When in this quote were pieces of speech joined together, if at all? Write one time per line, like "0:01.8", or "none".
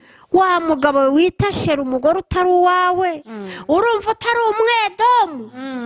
none